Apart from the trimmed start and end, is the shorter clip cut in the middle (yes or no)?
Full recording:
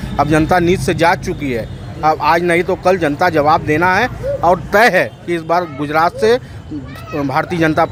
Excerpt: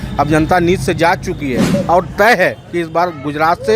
yes